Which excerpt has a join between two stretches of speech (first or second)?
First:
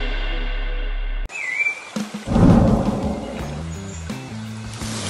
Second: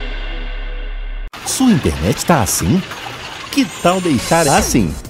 second